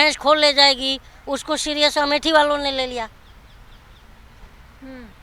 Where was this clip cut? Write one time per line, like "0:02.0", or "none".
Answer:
none